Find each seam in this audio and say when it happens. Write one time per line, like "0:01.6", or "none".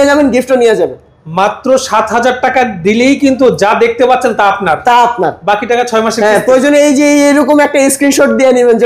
none